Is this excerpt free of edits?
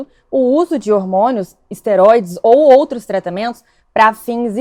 yes; 0 cuts

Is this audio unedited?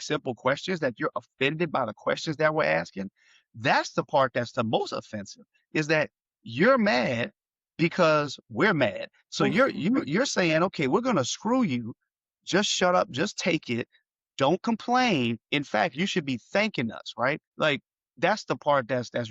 no; 1 cut; at 17.5 s

